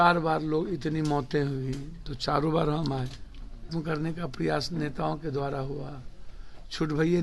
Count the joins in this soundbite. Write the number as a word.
one